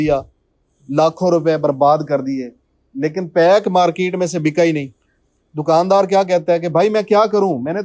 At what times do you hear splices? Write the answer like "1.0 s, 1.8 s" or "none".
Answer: none